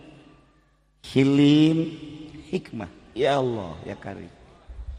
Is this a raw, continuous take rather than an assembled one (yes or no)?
yes